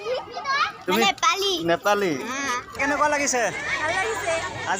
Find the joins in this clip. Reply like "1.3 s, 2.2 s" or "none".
2.8 s